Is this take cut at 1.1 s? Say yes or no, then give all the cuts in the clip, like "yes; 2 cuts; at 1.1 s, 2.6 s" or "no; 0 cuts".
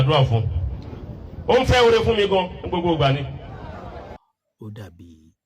no; 1 cut; at 4.2 s